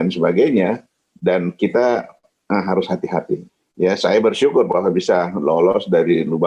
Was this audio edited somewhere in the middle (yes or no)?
yes